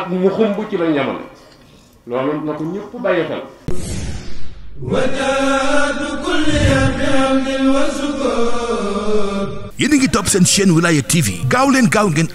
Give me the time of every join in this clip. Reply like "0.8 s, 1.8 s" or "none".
3.6 s